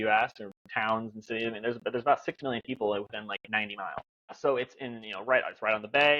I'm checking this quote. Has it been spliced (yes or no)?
yes